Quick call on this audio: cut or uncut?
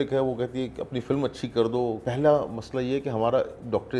cut